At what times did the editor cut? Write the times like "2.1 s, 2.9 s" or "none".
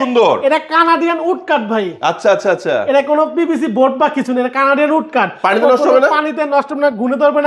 none